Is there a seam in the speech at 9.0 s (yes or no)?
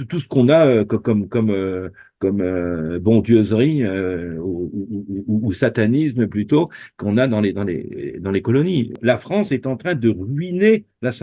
yes